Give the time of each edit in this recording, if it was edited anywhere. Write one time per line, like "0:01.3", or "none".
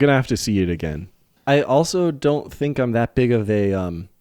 0:01.3